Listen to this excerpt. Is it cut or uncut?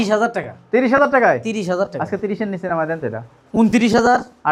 uncut